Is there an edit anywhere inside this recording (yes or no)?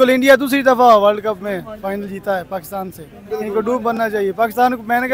no